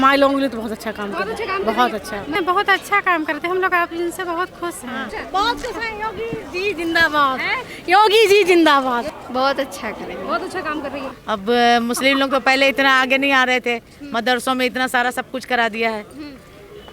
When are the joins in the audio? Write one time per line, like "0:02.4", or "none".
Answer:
0:02.4
0:05.1
0:09.1
0:11.2